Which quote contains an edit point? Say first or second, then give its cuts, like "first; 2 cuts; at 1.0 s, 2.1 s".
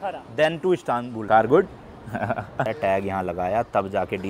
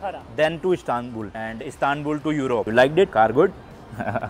first; 2 cuts; at 1.3 s, 2.7 s